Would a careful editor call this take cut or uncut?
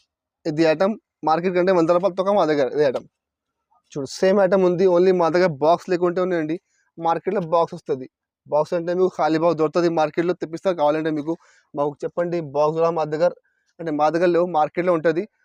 uncut